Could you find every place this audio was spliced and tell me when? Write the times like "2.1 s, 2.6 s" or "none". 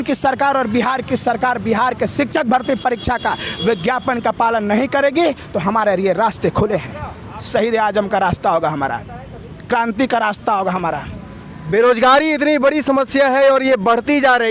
none